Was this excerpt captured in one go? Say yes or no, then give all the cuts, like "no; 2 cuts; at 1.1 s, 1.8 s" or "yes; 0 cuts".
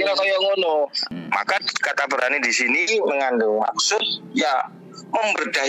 no; 1 cut; at 1.1 s